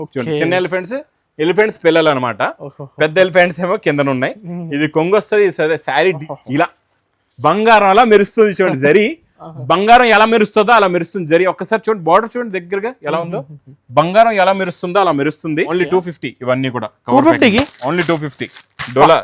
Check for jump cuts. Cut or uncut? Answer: cut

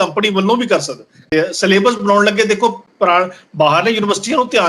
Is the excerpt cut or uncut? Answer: cut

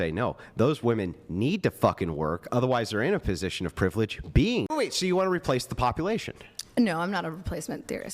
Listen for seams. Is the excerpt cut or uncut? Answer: cut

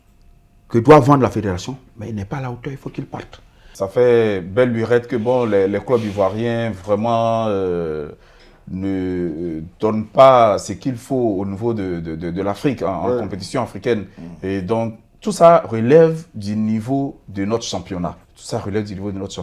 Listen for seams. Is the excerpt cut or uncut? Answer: cut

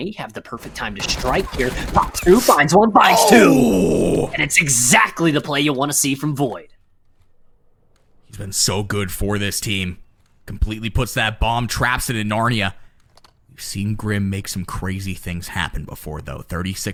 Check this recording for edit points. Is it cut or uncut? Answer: uncut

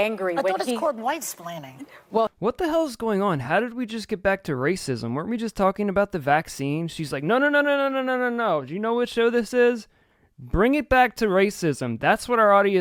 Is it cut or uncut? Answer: uncut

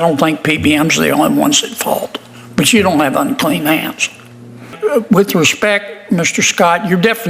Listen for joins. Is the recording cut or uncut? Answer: cut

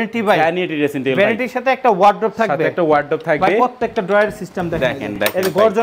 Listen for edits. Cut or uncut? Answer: uncut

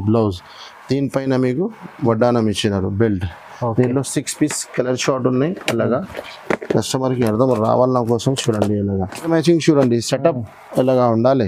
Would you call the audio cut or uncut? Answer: cut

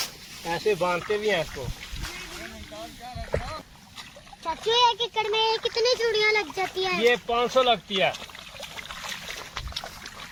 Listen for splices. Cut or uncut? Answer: uncut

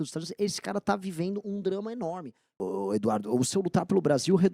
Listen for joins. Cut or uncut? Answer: cut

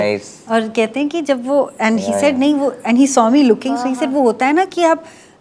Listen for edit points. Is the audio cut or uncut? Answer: uncut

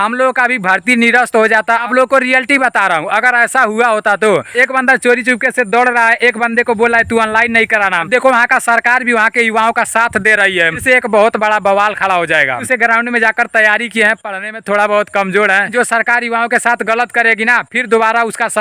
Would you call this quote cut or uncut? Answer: cut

